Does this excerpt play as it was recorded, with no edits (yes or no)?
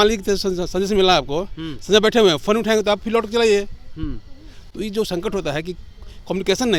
yes